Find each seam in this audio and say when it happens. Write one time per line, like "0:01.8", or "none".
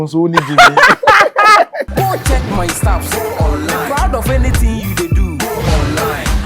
0:01.9